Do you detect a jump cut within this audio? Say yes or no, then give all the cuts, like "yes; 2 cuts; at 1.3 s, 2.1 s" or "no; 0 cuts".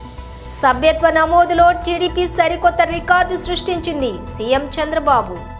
no; 0 cuts